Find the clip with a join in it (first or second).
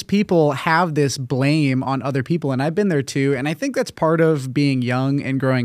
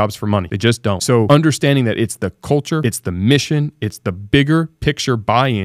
second